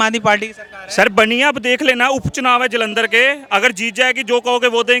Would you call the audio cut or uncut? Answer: uncut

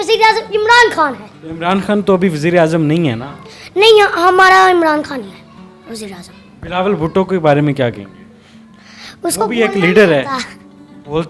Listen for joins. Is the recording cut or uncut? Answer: uncut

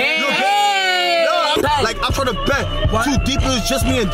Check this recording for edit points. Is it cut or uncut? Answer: cut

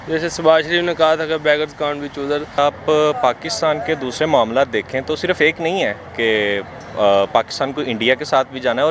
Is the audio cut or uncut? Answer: cut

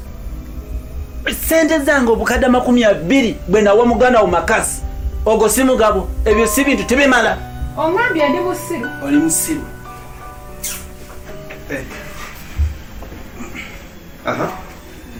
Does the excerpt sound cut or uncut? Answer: uncut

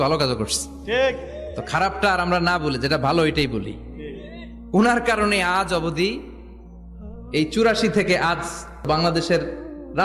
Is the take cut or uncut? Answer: cut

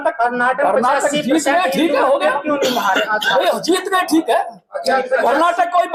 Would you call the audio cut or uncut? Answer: uncut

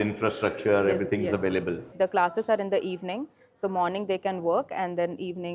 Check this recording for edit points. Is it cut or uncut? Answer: cut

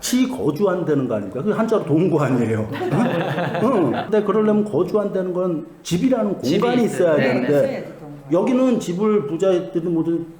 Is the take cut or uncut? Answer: cut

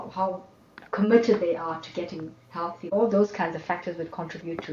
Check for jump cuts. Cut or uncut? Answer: cut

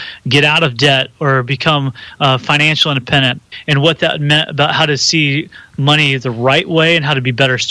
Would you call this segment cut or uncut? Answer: cut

